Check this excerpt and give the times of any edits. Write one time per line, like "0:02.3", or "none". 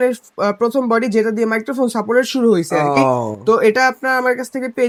none